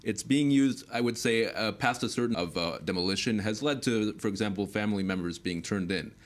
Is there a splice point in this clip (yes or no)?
no